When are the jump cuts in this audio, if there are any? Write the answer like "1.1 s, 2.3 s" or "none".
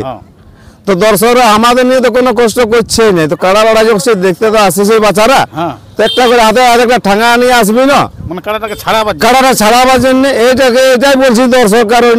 none